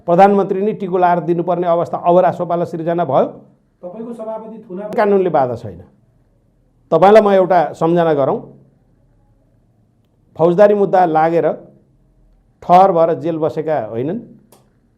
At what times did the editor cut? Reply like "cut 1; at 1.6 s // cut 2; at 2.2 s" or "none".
cut 1; at 5.0 s